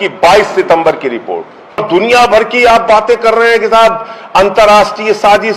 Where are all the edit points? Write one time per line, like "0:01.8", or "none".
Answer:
0:01.8